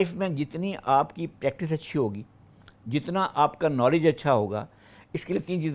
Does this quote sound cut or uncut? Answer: uncut